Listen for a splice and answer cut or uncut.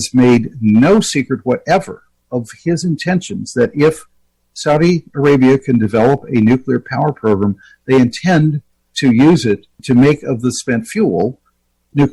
uncut